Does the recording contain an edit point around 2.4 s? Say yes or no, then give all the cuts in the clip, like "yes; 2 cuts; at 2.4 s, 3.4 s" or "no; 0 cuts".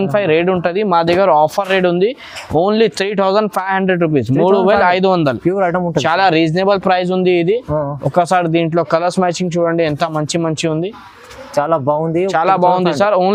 no; 0 cuts